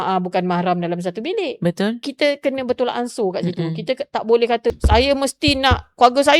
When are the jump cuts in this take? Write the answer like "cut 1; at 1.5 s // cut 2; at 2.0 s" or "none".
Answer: cut 1; at 2.1 s // cut 2; at 4.7 s